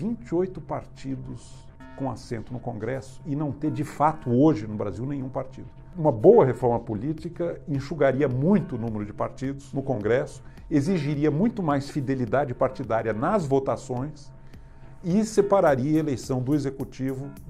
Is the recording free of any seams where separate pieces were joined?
no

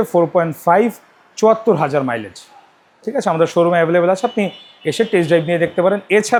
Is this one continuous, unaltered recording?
yes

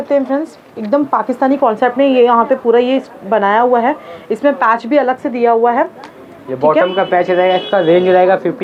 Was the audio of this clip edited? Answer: no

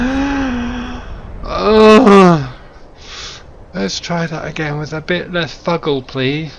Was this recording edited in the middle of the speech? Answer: no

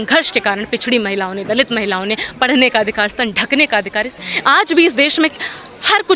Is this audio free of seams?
no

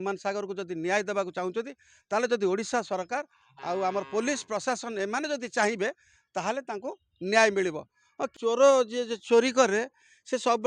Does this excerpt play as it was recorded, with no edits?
no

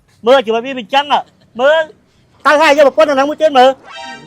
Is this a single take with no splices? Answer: no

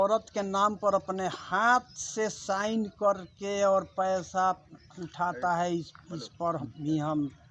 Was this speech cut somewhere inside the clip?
no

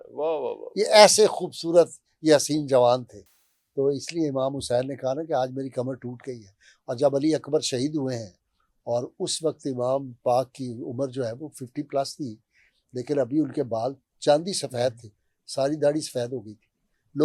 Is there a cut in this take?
no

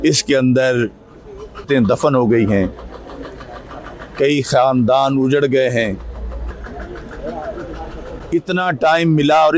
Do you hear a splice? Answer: yes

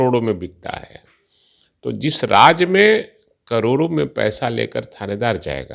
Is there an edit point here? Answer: no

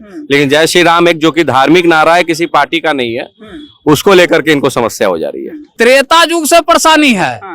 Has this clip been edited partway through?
yes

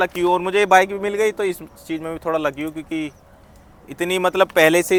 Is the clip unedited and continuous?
yes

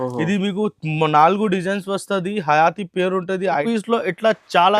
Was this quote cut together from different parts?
yes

